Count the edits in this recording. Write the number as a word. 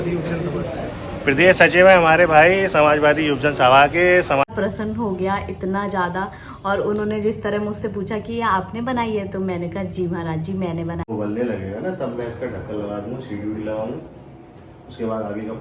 two